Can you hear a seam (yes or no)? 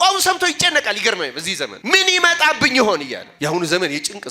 yes